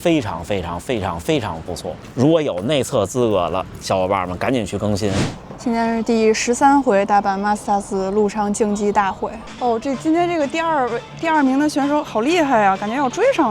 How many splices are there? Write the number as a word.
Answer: three